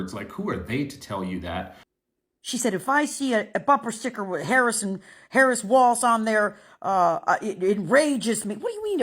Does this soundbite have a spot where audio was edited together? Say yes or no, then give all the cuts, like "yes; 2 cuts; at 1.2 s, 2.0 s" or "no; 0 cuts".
yes; 1 cut; at 1.8 s